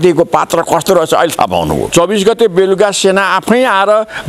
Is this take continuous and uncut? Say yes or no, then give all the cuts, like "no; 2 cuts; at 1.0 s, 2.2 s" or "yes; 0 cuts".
no; 1 cut; at 1.9 s